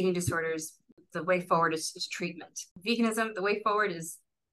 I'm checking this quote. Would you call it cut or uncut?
cut